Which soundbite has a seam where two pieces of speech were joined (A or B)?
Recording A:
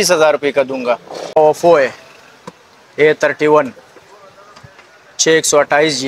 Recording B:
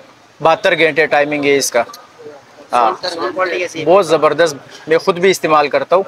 A